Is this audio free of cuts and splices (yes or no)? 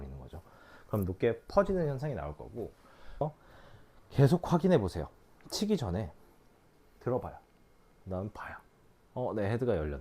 no